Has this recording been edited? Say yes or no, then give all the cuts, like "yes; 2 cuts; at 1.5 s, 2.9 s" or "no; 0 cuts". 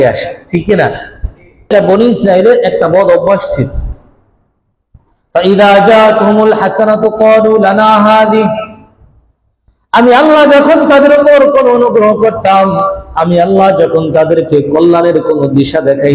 yes; 1 cut; at 1.7 s